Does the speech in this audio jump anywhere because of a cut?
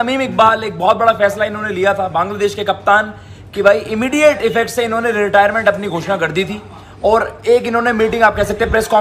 no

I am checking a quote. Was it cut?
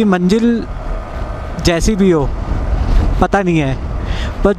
no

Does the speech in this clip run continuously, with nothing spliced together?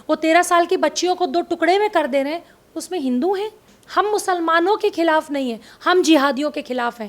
no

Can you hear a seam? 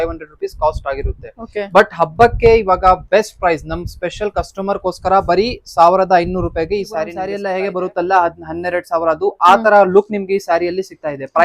yes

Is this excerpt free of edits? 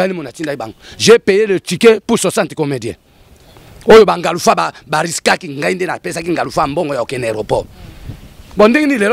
yes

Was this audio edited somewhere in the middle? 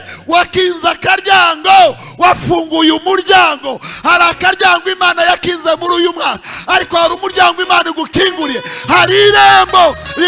no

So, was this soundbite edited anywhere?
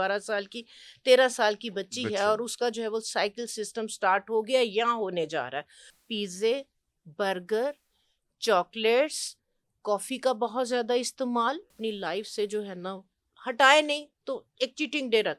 yes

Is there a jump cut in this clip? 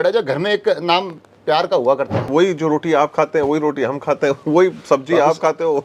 yes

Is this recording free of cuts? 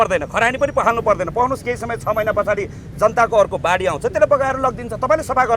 yes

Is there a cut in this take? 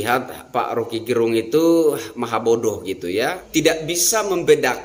yes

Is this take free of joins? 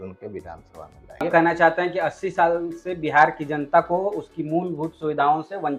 no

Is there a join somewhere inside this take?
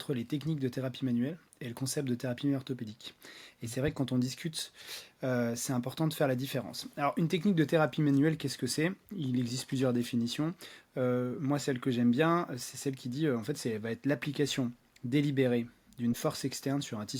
no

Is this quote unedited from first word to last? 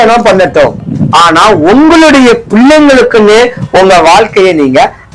yes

